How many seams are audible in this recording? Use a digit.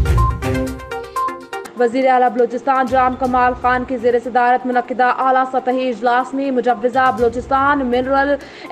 1